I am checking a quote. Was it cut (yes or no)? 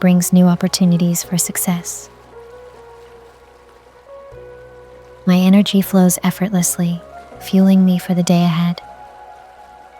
yes